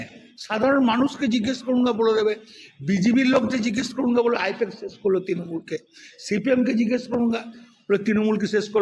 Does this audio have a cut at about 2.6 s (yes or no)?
no